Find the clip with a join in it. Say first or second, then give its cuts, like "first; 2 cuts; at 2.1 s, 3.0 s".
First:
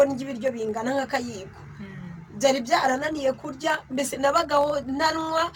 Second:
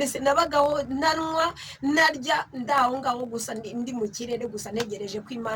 second; 1 cut; at 2.5 s